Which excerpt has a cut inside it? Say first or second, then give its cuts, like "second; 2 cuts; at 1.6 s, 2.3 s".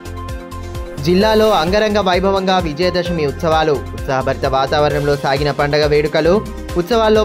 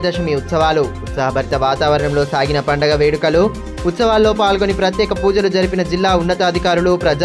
first; 1 cut; at 1.0 s